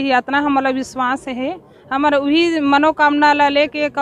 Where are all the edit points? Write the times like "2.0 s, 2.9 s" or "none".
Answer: none